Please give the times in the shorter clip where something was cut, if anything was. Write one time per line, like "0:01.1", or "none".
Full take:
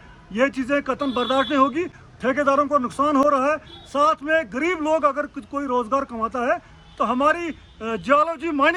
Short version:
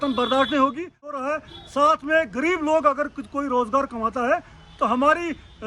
0:01.2

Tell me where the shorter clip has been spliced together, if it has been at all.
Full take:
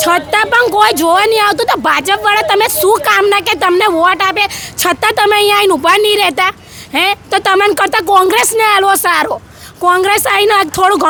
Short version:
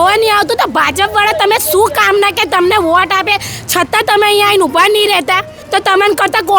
0:05.6

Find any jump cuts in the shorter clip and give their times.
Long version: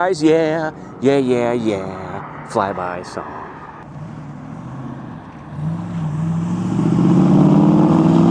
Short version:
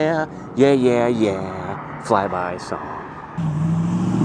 0:03.3

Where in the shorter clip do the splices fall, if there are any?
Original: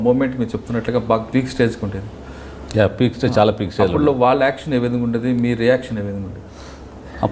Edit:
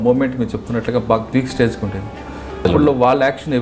0:02.6

